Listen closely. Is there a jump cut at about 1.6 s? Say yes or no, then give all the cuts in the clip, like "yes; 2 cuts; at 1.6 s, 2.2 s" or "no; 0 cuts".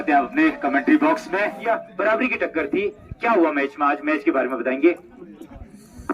yes; 1 cut; at 1.6 s